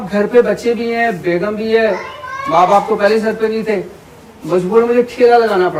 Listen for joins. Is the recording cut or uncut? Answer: uncut